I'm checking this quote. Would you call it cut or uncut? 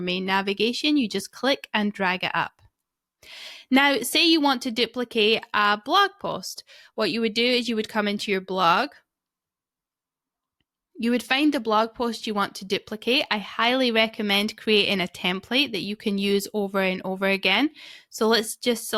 uncut